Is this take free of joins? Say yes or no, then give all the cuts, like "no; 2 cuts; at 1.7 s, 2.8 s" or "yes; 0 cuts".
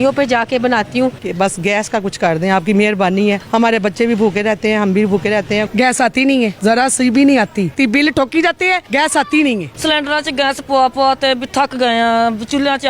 no; 7 cuts; at 1.2 s, 3.4 s, 5.7 s, 6.6 s, 7.7 s, 8.8 s, 9.7 s